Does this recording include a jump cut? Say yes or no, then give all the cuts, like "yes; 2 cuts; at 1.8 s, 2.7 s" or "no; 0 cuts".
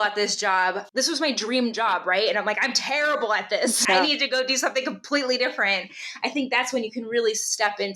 yes; 2 cuts; at 0.8 s, 3.8 s